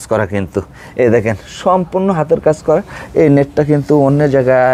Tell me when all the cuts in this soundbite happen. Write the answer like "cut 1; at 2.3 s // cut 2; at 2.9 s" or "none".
none